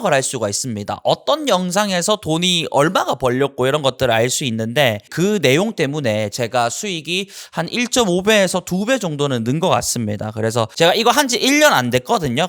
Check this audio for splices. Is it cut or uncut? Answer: cut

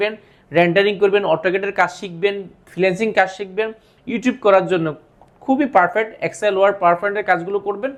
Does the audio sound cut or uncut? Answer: uncut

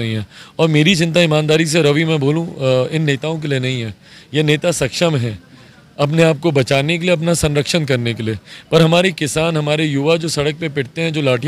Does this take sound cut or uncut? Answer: uncut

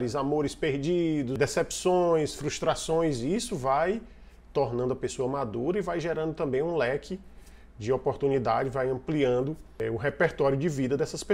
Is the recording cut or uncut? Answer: cut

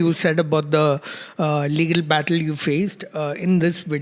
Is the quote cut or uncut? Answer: uncut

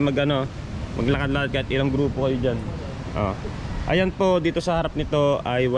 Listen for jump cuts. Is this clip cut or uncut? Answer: uncut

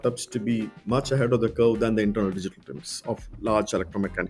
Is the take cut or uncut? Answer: uncut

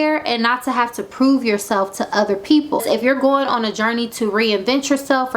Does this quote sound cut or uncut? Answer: cut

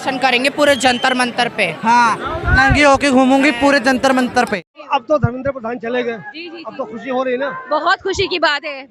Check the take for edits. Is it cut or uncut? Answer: uncut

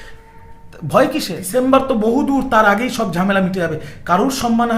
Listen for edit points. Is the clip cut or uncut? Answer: cut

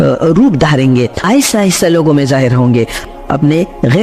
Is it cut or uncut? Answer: cut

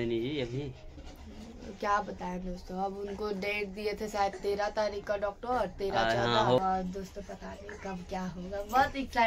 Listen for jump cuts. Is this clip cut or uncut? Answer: uncut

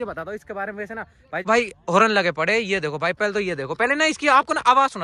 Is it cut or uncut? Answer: cut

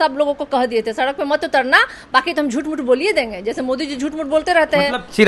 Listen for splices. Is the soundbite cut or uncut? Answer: uncut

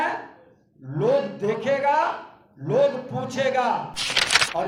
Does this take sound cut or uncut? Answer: uncut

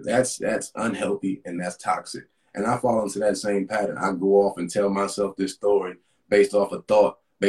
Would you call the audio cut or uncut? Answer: uncut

